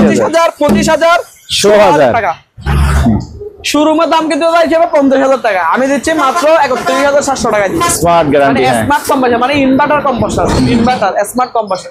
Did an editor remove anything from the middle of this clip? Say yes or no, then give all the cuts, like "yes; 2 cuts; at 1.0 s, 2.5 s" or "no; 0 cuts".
yes; 2 cuts; at 2.6 s, 7.9 s